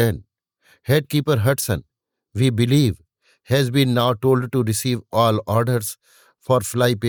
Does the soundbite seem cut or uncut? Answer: uncut